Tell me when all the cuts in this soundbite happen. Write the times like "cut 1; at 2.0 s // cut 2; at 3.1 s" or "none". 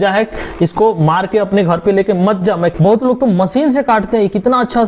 cut 1; at 2.7 s